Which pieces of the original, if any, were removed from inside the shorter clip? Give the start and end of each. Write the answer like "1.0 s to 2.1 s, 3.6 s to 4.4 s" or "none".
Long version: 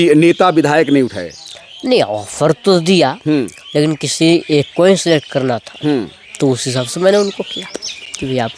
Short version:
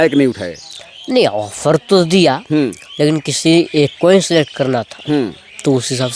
none